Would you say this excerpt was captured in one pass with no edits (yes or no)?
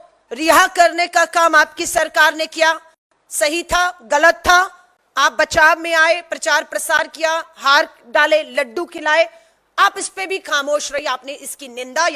yes